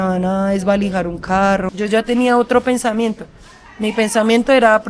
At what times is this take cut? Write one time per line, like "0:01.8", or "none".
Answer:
0:01.7